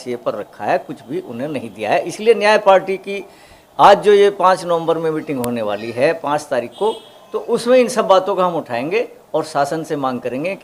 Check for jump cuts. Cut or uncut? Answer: uncut